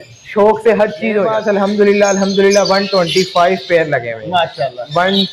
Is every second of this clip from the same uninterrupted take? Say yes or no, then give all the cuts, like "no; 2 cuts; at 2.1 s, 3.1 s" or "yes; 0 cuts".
no; 1 cut; at 1.3 s